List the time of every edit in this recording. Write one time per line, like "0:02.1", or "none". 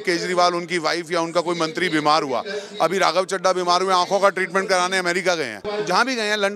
0:05.6